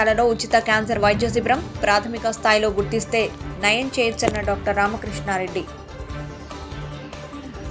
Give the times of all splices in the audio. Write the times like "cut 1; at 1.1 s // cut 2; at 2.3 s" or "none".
none